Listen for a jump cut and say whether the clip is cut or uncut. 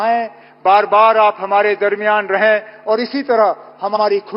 uncut